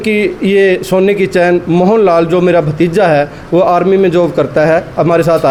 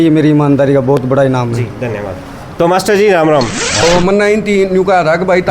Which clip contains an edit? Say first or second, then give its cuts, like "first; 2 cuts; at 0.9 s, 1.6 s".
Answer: second; 1 cut; at 3.8 s